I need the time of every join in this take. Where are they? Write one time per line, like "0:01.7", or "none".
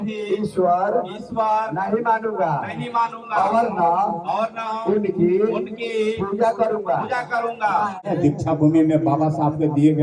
0:08.0